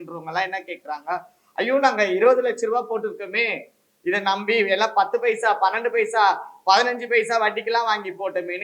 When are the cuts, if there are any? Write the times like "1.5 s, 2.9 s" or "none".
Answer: none